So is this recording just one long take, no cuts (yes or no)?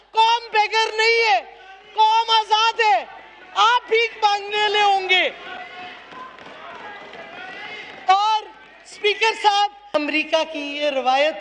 yes